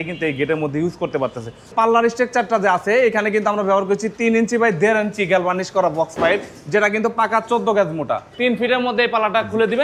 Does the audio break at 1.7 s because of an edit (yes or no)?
yes